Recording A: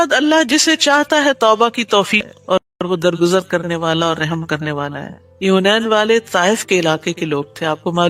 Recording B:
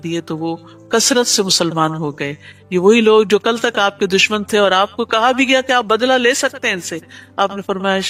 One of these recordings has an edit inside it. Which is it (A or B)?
A